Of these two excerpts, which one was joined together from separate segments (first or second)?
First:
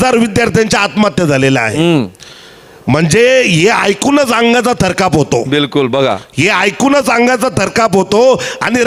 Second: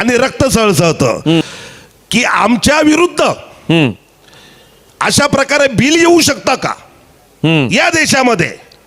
second